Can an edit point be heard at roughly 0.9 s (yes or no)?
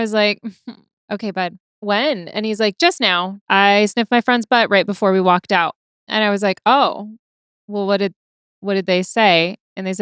yes